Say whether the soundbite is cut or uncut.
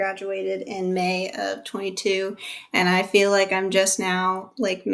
uncut